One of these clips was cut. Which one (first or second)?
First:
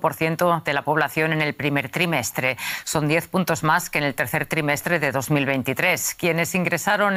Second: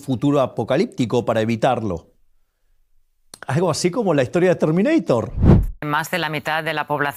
second